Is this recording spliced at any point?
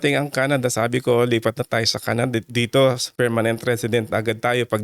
yes; 1 cut; at 3.1 s

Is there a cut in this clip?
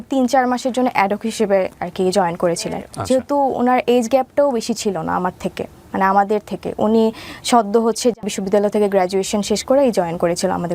yes; 2 cuts; at 2.9 s, 8.3 s

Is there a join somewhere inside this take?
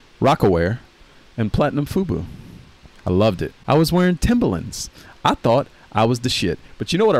yes; 1 cut; at 3.6 s

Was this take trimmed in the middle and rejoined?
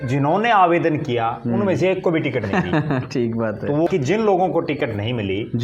yes; 1 cut; at 3.9 s

